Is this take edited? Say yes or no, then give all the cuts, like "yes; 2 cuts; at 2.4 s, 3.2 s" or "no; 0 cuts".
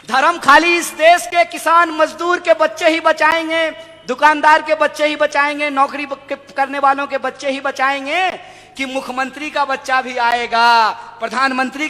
no; 0 cuts